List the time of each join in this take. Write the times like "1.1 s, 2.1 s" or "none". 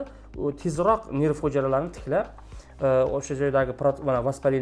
none